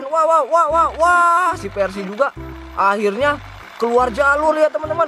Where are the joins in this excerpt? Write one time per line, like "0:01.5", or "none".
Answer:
none